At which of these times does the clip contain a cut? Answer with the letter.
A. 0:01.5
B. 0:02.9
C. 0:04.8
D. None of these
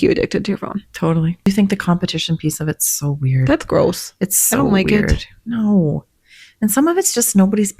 A